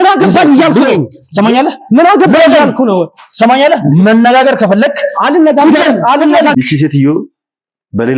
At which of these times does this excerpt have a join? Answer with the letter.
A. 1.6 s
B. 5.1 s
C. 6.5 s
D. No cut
C